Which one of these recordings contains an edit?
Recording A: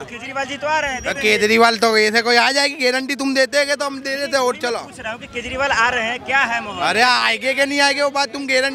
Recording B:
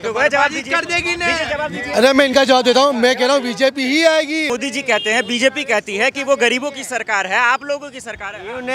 B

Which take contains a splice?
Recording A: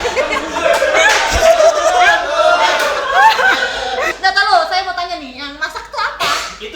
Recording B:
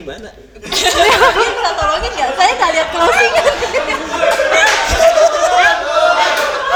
A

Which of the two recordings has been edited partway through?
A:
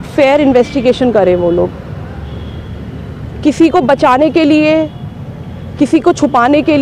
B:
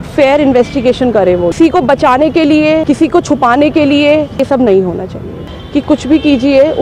B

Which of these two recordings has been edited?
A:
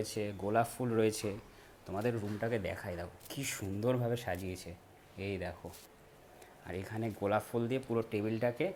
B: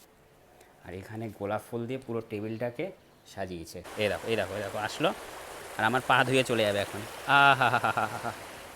B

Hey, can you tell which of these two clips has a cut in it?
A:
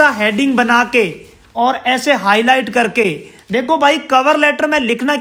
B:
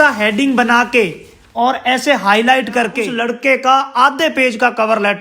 B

